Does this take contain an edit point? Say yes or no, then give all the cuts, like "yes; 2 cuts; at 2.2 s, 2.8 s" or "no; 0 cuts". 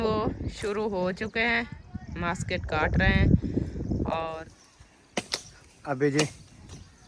yes; 1 cut; at 4.5 s